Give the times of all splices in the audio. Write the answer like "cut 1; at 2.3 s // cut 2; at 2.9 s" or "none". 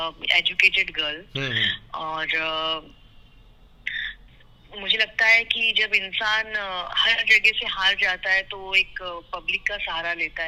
none